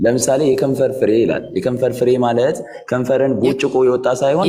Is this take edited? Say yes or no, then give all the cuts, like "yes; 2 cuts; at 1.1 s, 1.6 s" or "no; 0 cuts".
no; 0 cuts